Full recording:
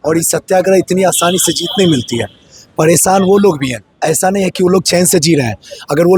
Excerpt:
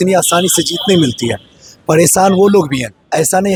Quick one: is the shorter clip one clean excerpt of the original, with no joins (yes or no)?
yes